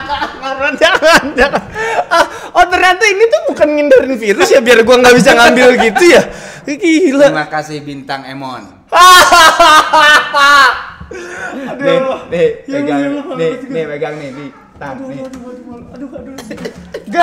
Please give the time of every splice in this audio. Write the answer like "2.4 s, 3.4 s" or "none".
none